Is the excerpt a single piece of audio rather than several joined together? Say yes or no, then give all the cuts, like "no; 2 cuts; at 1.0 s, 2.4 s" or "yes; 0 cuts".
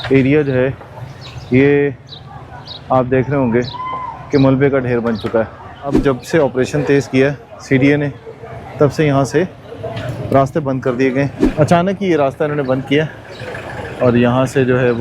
no; 2 cuts; at 6.0 s, 11.4 s